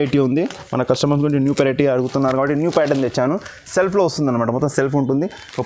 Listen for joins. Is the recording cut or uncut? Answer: uncut